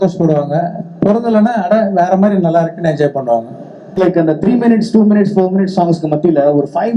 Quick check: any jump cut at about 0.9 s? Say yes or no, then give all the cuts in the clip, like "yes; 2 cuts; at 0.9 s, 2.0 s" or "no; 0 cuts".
no; 1 cut; at 3.9 s